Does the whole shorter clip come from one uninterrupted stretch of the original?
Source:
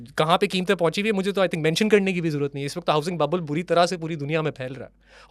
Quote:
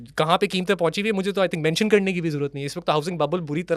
yes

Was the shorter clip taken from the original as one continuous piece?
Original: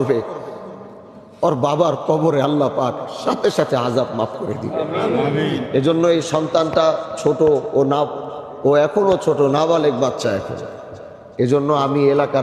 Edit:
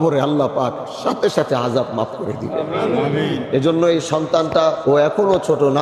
no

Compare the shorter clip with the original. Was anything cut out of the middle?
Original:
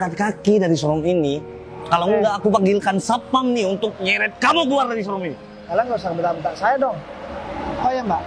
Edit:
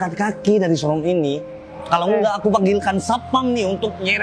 no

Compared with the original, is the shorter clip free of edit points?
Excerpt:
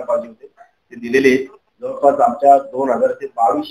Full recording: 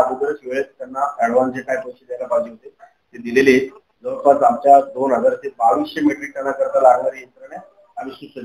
yes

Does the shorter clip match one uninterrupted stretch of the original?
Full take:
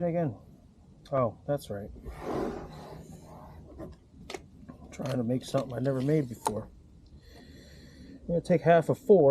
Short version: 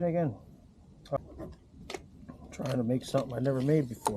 no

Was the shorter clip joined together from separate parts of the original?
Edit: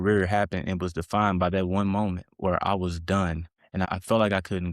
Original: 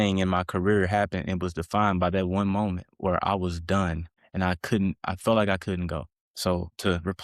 yes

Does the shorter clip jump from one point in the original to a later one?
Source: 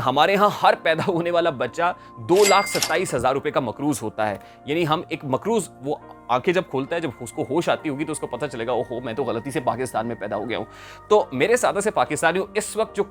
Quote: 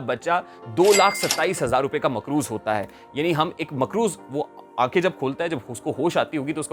no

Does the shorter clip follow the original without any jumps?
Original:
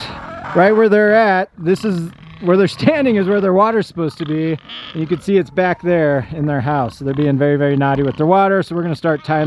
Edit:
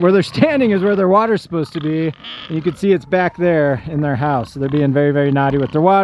yes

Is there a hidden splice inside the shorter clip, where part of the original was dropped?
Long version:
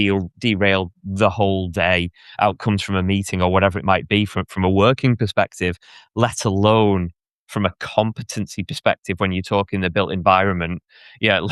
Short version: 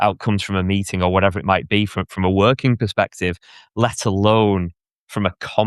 no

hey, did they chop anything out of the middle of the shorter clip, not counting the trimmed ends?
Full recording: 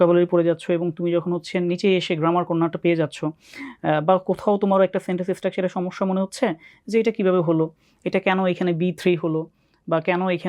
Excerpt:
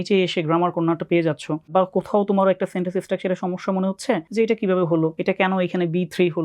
yes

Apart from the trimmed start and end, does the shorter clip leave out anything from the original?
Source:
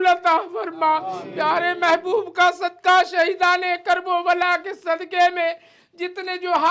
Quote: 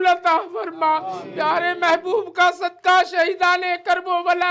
no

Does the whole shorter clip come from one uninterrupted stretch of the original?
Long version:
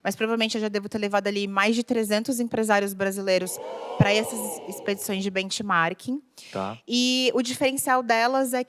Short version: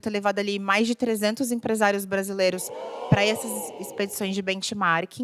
yes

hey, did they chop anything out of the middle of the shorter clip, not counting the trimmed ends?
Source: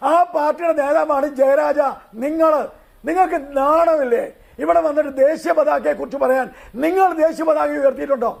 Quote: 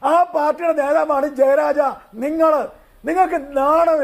no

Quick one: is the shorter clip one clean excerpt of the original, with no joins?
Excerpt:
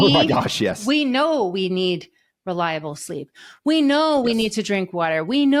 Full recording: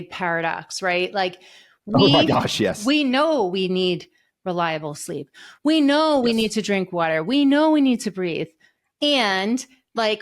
yes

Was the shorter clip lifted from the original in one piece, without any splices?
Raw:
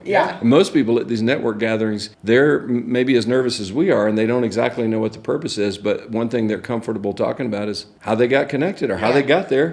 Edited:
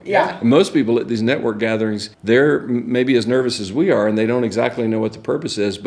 yes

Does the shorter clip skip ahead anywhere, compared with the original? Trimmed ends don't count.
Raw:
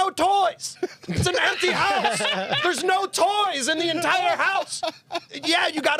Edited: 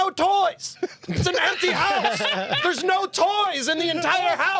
no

